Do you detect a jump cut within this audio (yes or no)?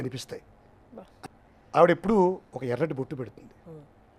yes